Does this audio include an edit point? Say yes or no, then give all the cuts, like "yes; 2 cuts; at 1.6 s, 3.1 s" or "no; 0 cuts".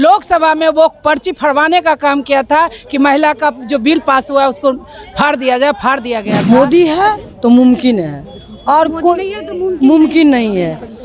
yes; 1 cut; at 6.3 s